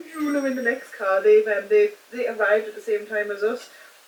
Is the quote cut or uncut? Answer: uncut